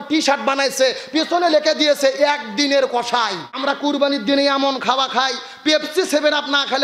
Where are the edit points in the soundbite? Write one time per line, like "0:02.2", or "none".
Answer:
0:03.5